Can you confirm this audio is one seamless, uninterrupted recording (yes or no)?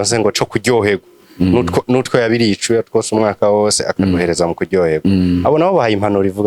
yes